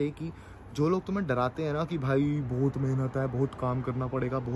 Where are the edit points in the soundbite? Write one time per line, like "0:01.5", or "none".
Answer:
none

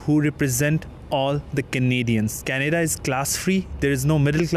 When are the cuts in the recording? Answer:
none

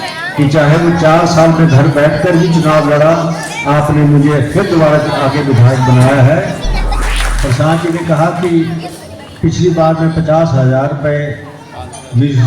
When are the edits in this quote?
0:06.9

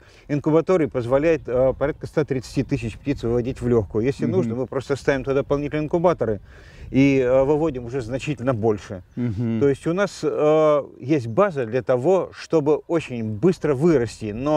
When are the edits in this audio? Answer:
none

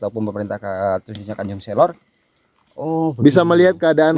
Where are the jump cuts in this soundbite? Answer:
none

